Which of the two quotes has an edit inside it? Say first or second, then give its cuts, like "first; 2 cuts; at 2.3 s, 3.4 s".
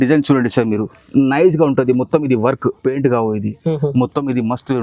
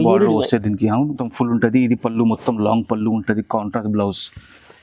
second; 1 cut; at 1.2 s